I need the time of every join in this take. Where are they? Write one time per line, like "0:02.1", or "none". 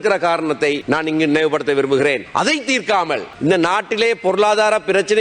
0:00.8
0:02.2
0:03.3